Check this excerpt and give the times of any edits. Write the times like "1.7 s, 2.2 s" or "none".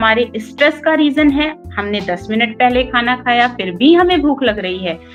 none